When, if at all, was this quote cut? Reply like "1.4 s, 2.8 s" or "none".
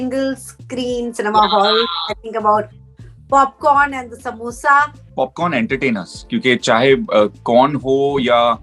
5.0 s